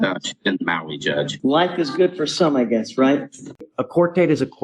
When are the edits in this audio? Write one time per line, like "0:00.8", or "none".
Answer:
0:01.3
0:03.6